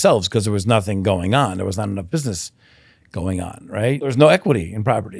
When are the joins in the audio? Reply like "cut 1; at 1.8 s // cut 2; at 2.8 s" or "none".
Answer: cut 1; at 4.1 s